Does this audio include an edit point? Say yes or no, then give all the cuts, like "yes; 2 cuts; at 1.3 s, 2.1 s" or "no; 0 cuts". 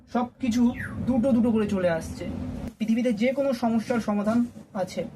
yes; 1 cut; at 2.7 s